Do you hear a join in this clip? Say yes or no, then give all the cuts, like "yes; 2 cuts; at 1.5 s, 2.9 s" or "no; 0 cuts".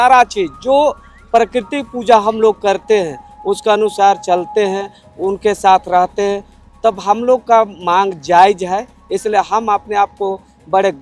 no; 0 cuts